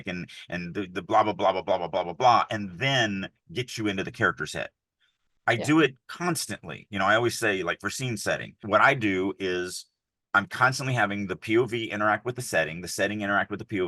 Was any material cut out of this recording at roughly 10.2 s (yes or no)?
no